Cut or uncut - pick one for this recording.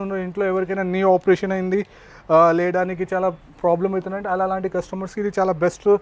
uncut